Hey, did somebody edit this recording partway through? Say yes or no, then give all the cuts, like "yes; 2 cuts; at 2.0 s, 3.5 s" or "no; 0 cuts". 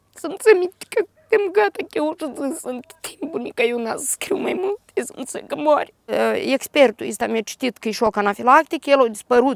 yes; 1 cut; at 6.1 s